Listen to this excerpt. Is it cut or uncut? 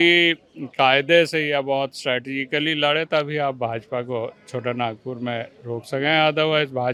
uncut